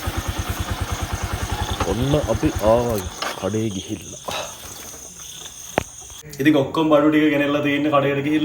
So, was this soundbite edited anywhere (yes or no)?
no